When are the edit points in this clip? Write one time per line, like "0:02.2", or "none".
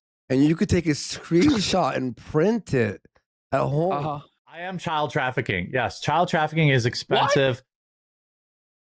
0:04.7